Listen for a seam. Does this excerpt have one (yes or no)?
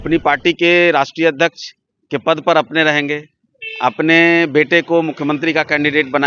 no